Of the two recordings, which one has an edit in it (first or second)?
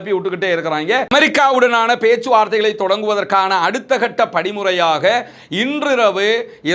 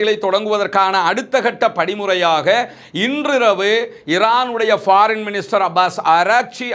first